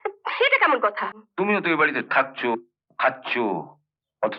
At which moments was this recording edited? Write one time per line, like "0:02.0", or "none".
0:01.3